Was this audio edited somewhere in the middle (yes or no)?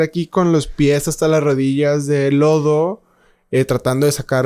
no